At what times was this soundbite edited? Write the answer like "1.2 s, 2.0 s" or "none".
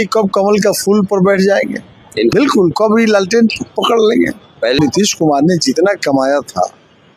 2.3 s, 4.8 s